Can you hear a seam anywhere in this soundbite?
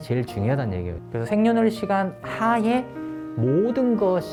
no; 0 cuts

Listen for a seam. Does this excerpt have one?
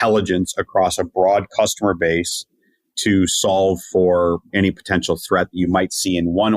yes; 1 cut; at 4.5 s

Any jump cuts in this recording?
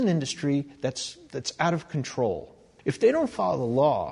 yes; 1 cut; at 2.8 s

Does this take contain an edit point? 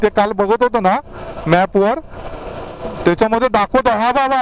no; 0 cuts

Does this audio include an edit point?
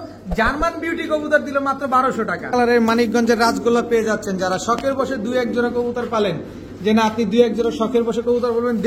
yes; 1 cut; at 2.5 s

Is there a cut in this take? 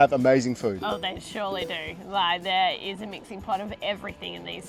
no; 0 cuts

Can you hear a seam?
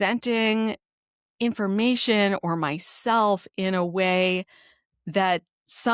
no; 0 cuts

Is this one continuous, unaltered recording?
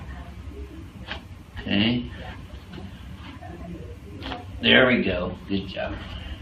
no; 1 cut; at 1.7 s

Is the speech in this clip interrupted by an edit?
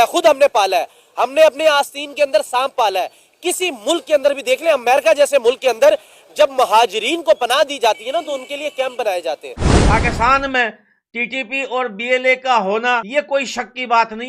yes; 1 cut; at 9.7 s

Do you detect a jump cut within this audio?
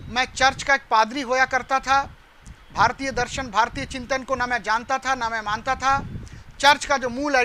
no; 0 cuts

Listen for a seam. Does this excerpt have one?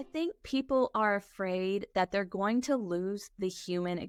no; 0 cuts

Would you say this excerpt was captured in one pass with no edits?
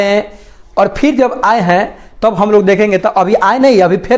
yes; 0 cuts

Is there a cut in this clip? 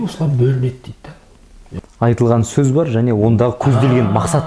yes; 1 cut; at 1.8 s

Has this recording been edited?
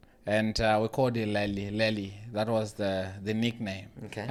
no; 0 cuts

